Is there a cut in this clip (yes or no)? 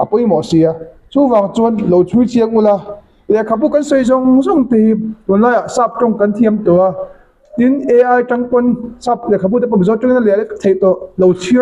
no